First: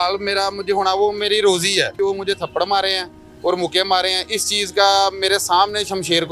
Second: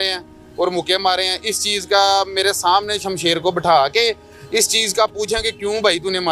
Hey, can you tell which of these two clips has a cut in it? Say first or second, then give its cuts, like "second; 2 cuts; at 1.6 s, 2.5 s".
first; 1 cut; at 2.0 s